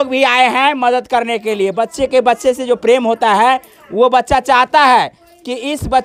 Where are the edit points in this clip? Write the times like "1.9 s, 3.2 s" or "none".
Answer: none

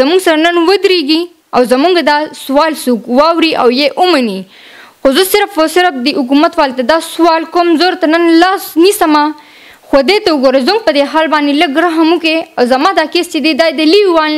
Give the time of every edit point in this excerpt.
none

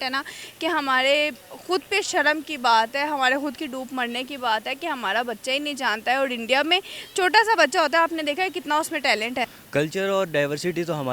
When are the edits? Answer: 9.6 s

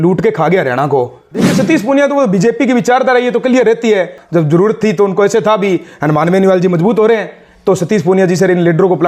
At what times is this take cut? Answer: 1.5 s, 4.2 s

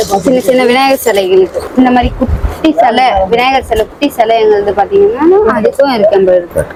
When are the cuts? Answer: none

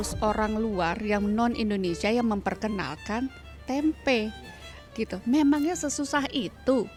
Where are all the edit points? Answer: none

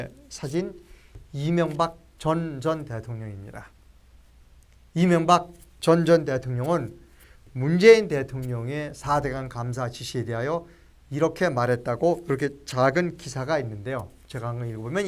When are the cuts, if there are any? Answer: 10.3 s

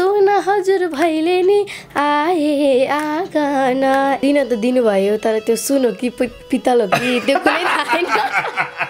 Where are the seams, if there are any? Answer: 4.2 s

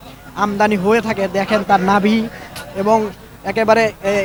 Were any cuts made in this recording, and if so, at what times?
none

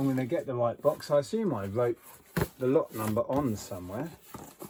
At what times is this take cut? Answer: none

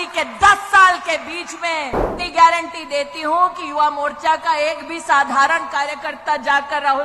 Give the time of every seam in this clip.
2.1 s

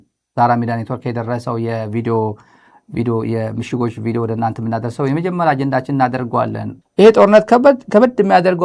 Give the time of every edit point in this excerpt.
6.7 s

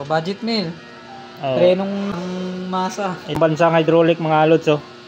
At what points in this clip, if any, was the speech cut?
2.1 s, 3.4 s

